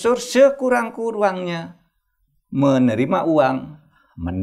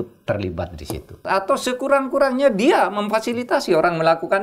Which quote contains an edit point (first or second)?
second